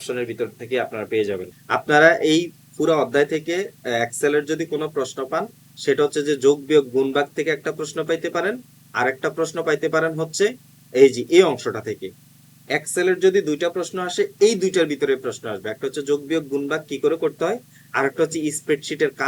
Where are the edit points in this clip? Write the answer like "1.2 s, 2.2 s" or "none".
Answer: 1.5 s